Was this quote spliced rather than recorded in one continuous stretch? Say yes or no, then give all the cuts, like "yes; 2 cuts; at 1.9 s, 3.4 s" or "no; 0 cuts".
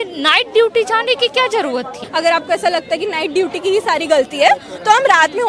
yes; 1 cut; at 2.0 s